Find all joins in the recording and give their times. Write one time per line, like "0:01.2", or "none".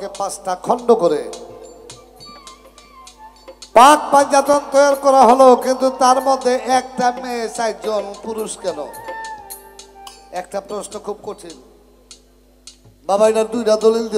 none

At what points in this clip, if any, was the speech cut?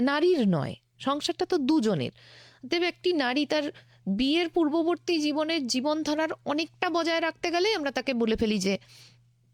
none

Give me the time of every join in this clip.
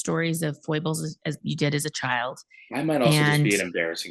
none

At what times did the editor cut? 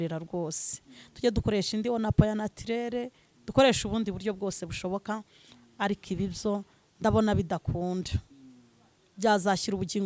none

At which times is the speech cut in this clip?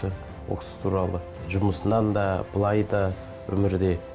0:01.4

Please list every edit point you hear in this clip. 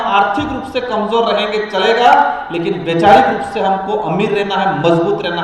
none

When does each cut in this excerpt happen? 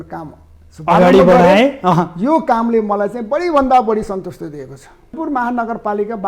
0:05.1

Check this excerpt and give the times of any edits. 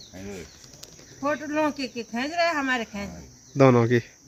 none

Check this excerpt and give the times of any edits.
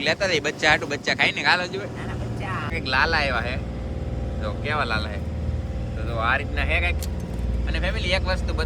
0:02.7

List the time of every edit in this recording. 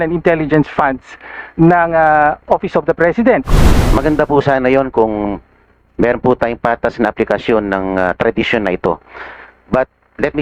0:03.4

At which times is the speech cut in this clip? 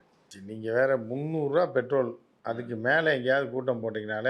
0:02.7

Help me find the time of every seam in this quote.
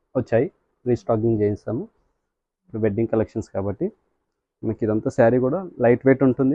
none

